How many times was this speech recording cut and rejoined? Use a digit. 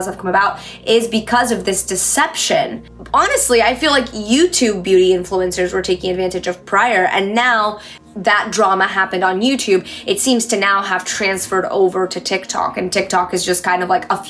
2